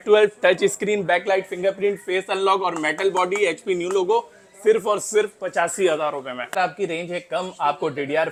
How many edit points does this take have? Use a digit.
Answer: 0